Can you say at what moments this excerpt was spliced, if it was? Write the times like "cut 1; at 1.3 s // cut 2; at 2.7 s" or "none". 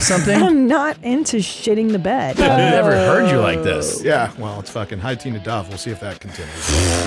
cut 1; at 2.4 s